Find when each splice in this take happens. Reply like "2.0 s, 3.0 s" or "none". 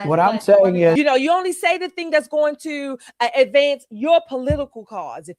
0.9 s